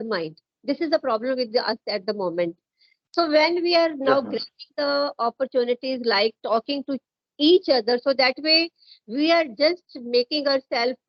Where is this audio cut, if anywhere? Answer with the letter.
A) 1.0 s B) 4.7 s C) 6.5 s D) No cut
D